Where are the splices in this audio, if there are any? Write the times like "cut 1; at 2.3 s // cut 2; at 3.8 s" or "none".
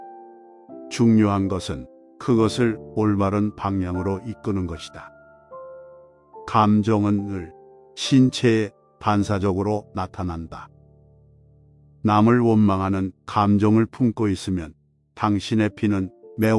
cut 1; at 1.0 s